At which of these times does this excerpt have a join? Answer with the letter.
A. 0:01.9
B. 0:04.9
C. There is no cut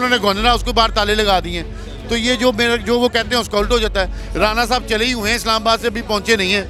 C